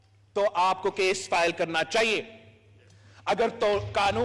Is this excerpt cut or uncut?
uncut